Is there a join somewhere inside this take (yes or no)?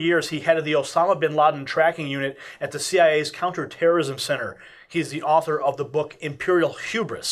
yes